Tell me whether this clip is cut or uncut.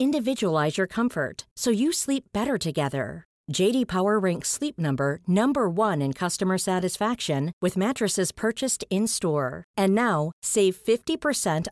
uncut